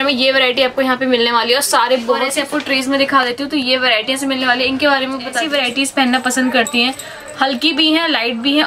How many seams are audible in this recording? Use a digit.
2